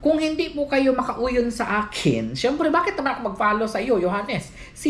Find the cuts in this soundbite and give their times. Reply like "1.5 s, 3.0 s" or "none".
none